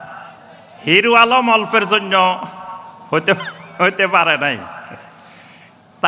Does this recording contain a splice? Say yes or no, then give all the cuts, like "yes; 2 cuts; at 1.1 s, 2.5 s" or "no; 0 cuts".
no; 0 cuts